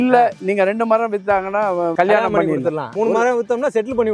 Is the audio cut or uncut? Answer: cut